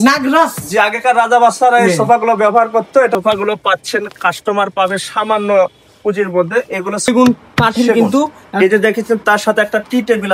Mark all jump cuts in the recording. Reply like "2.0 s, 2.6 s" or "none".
3.2 s, 7.1 s

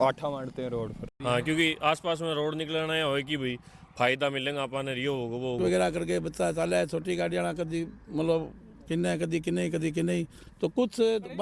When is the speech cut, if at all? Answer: 1.1 s, 5.6 s

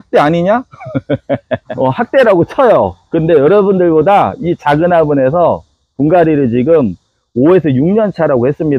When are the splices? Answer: 1.7 s

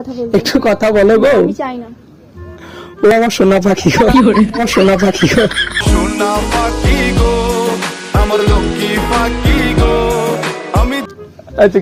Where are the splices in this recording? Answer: none

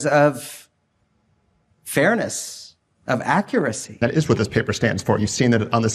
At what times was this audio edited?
4.0 s

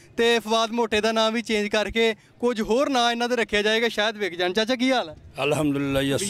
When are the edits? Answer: none

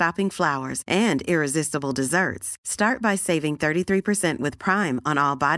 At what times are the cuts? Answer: none

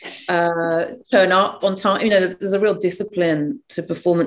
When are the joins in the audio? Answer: none

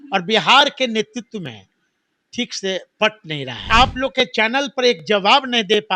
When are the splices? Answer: 3.7 s

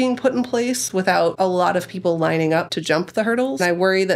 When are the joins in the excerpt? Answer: 1.3 s, 3.3 s

